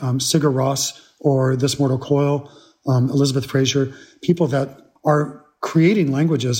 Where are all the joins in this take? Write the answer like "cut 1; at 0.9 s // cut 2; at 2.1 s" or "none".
cut 1; at 4.8 s